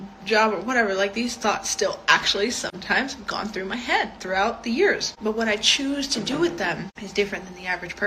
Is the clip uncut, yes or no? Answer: no